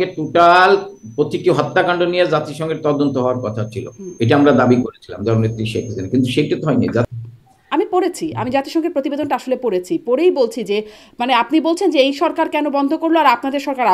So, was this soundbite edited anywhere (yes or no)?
yes